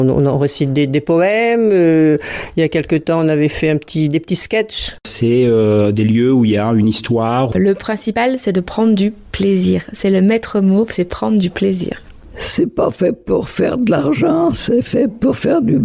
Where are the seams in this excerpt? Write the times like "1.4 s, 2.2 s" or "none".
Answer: 5.1 s, 7.5 s, 12.1 s